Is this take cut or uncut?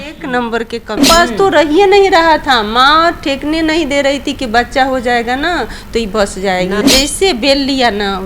cut